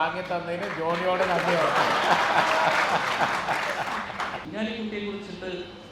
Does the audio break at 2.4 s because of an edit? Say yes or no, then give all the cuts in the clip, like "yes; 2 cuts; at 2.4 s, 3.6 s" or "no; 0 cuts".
no; 1 cut; at 4.4 s